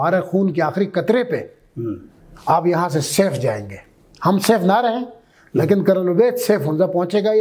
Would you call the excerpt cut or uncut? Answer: uncut